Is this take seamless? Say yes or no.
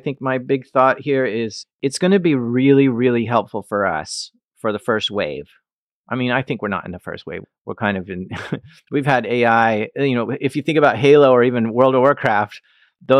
no